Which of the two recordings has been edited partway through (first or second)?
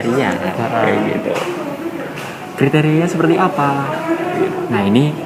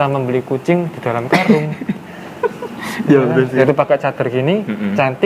second